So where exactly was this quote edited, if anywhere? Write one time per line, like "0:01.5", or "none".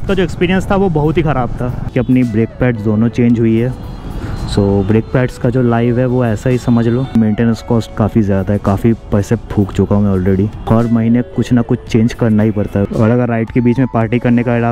0:01.8
0:07.1
0:12.9